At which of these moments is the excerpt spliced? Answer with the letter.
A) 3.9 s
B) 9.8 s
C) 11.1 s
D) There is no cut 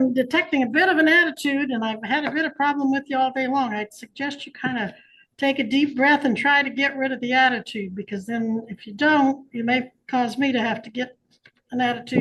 D